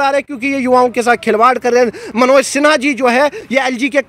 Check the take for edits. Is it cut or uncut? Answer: uncut